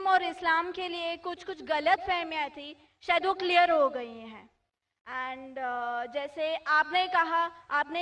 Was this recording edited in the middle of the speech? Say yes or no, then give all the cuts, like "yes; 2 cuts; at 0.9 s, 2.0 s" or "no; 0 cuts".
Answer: yes; 1 cut; at 3.4 s